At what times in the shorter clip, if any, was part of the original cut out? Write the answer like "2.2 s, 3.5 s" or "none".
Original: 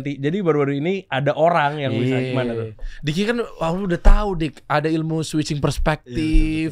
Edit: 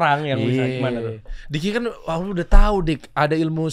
none